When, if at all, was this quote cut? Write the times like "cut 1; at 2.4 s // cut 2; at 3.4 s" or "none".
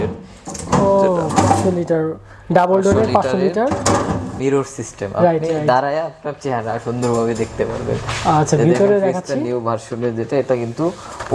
cut 1; at 4.4 s